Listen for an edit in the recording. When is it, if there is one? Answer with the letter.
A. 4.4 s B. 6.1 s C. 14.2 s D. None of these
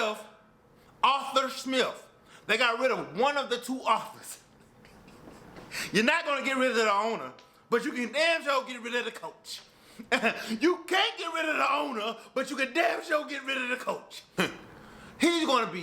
C